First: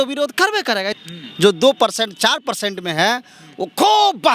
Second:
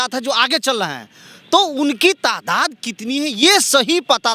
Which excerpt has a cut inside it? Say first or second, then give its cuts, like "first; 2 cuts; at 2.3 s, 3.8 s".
first; 1 cut; at 0.9 s